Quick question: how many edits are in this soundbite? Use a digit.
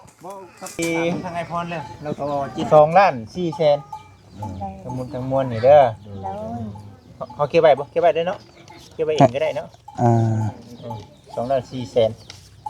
1